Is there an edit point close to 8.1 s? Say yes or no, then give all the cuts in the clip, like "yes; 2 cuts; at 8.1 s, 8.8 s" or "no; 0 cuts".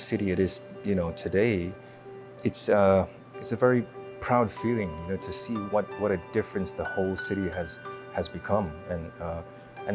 no; 0 cuts